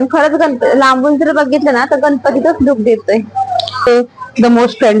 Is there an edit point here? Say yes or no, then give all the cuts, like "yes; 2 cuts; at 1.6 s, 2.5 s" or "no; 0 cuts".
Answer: yes; 1 cut; at 3.9 s